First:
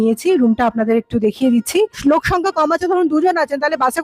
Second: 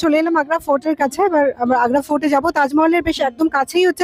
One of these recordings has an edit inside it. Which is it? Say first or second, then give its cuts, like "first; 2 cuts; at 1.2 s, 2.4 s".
first; 1 cut; at 2.0 s